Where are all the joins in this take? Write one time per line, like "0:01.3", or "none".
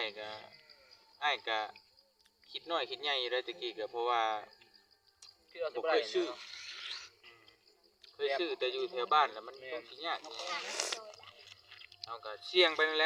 none